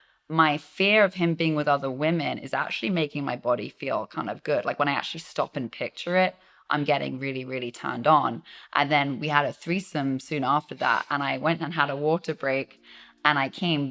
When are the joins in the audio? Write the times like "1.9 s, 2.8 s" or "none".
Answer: none